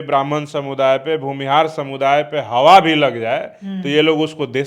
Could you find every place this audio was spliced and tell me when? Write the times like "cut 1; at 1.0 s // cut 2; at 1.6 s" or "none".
none